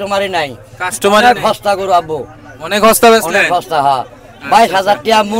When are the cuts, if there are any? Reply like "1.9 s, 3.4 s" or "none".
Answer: none